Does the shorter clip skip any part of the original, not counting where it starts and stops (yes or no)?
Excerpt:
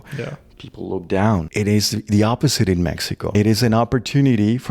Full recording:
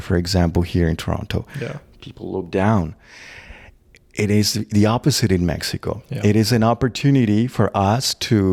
yes